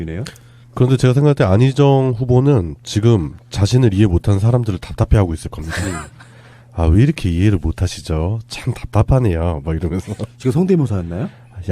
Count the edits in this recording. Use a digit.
1